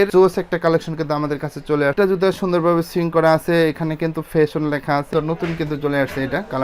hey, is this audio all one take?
no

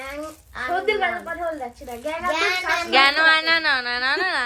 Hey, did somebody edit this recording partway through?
no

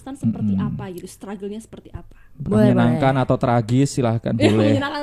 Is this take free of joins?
yes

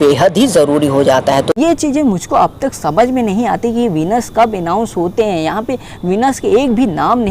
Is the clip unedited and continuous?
no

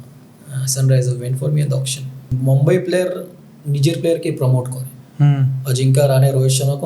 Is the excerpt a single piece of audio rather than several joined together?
no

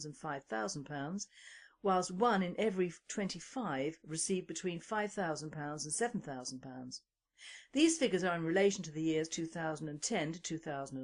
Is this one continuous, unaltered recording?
yes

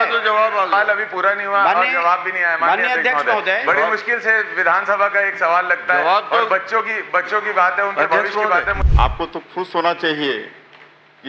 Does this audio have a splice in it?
yes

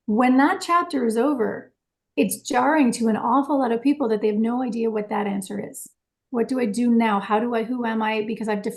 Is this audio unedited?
yes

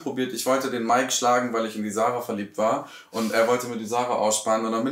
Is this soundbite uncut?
yes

